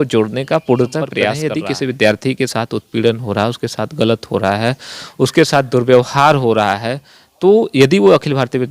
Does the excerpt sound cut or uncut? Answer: cut